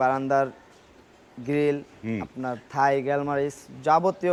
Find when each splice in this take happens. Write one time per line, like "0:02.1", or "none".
none